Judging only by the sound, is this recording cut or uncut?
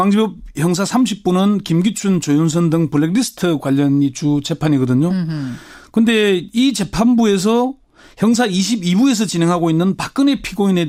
uncut